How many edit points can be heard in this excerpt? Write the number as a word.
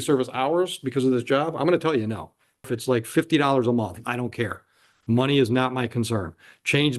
one